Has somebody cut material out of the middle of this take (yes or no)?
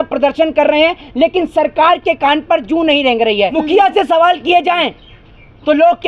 yes